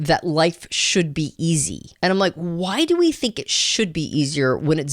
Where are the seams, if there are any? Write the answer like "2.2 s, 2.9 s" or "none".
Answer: 1.8 s